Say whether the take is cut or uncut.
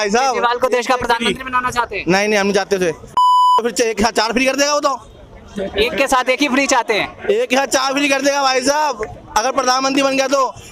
uncut